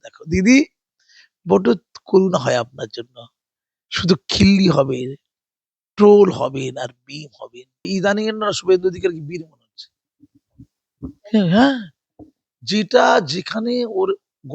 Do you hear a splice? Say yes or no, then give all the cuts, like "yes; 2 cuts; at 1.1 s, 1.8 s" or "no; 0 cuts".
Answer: yes; 1 cut; at 7.9 s